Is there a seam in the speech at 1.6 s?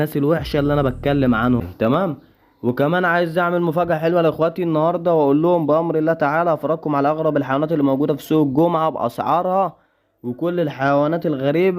yes; 1 cut; at 1.6 s

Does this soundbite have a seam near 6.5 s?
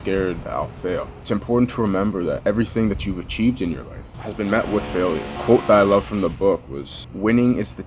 no; 2 cuts; at 1.2 s, 4.1 s

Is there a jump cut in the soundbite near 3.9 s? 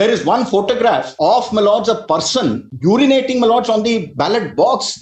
no; 2 cuts; at 1.1 s, 2.7 s

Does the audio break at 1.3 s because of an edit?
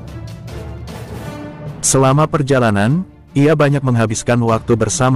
yes; 1 cut; at 1.3 s

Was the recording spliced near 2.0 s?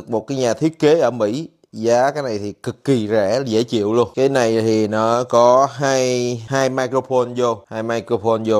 no; 3 cuts; at 4.1 s, 6.4 s, 7.7 s

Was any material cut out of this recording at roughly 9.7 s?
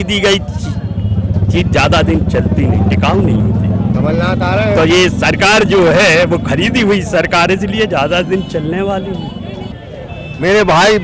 yes; 1 cut; at 9.7 s

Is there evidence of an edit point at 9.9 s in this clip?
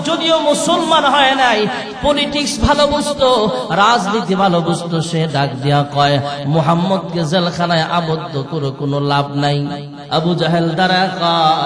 yes; 1 cut; at 9.9 s

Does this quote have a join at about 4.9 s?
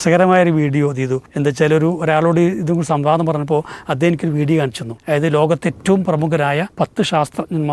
yes; 3 cuts; at 1.2 s, 4.9 s, 6.7 s

